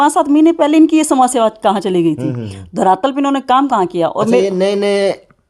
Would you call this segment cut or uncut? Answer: uncut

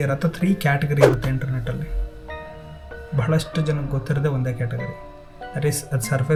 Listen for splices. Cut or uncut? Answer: uncut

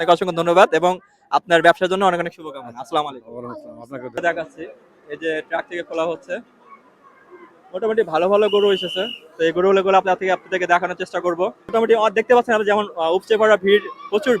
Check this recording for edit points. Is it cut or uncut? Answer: cut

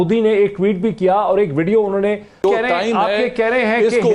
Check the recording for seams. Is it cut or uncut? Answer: cut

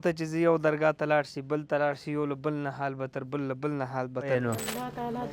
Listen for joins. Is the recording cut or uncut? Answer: cut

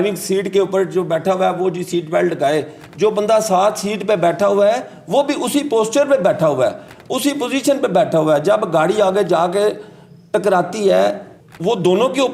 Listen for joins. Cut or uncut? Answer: uncut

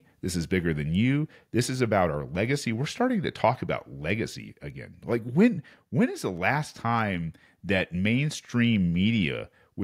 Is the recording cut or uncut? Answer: uncut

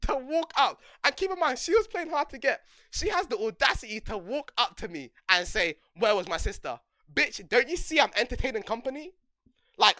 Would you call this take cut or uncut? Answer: uncut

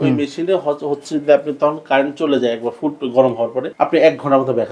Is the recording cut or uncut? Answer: cut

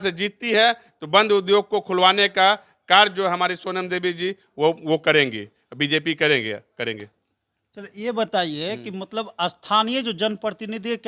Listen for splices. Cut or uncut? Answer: uncut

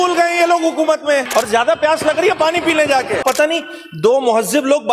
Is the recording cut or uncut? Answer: cut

